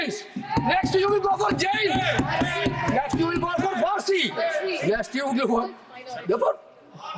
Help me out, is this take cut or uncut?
uncut